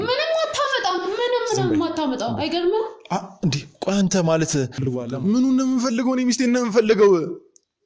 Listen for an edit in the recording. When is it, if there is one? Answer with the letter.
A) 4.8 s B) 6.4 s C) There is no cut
A